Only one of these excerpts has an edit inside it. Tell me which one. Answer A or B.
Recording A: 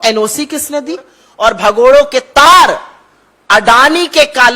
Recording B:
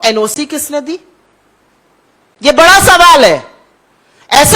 A